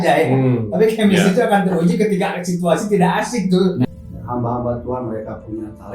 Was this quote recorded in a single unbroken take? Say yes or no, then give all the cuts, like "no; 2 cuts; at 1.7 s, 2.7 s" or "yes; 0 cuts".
no; 1 cut; at 3.9 s